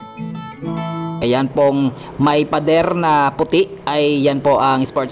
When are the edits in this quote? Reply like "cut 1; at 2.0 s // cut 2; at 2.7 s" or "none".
cut 1; at 1.2 s